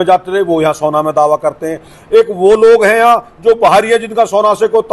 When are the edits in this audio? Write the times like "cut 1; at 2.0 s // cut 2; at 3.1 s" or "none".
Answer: none